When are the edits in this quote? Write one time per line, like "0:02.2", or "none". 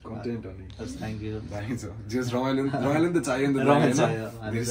none